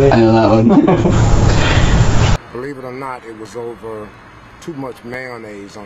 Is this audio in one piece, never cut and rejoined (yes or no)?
no